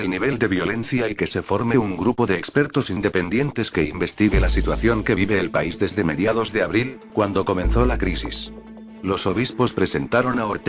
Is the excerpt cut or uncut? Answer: uncut